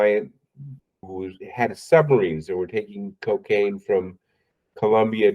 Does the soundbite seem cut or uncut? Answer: cut